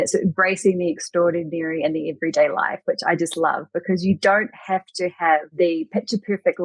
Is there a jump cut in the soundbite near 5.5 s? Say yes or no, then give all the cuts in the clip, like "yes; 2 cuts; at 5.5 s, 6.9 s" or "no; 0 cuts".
yes; 1 cut; at 5.5 s